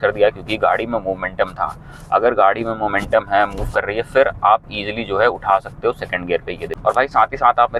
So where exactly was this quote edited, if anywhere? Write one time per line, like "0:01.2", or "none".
0:06.7